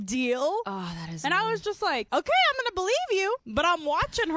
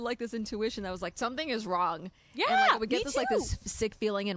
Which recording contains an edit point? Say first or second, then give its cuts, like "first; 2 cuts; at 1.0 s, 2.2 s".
first; 2 cuts; at 2.1 s, 3.4 s